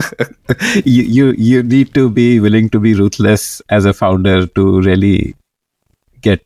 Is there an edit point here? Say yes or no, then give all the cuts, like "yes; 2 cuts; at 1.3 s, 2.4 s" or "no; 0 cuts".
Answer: no; 0 cuts